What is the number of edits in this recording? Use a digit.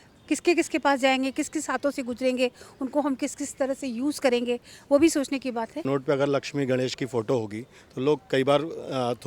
1